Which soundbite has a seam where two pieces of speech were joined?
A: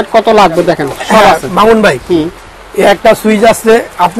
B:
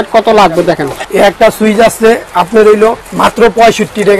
B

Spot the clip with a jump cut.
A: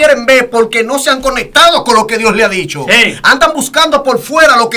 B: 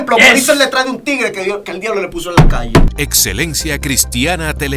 B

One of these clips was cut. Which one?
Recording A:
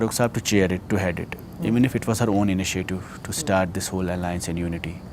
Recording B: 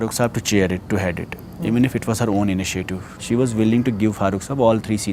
B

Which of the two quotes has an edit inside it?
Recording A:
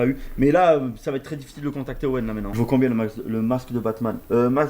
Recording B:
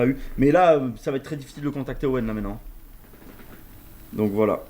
A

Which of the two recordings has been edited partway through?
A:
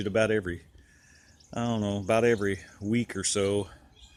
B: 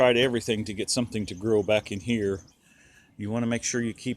B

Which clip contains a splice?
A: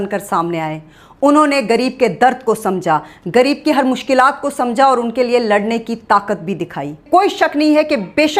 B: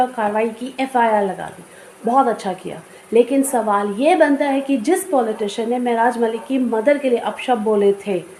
A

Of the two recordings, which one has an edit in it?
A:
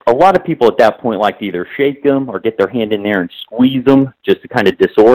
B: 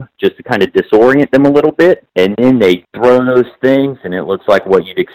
B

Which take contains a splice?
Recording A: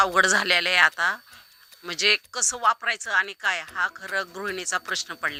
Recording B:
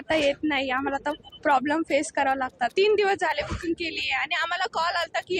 B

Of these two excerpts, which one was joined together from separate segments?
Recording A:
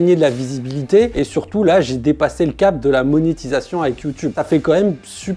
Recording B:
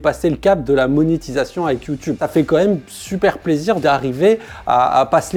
A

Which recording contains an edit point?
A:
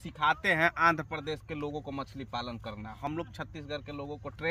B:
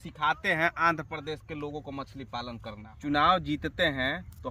B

